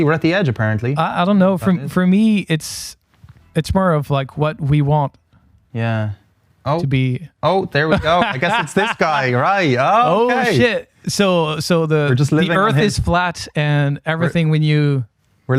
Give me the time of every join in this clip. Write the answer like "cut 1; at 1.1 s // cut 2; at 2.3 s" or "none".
none

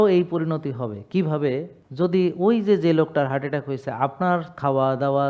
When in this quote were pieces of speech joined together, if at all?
cut 1; at 1.8 s

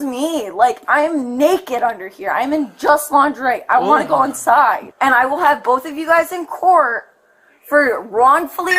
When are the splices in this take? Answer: cut 1; at 4.9 s

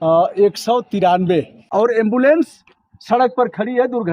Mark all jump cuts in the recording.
cut 1; at 1.6 s

